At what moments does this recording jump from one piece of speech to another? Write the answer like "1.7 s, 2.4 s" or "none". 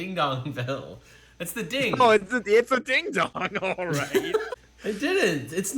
4.5 s